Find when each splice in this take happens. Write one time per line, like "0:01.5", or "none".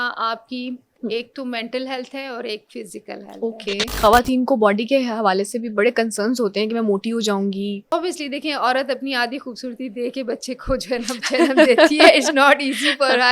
0:00.9
0:03.9
0:07.8